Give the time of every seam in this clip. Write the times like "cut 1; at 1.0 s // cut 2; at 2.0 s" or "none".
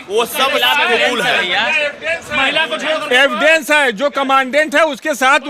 none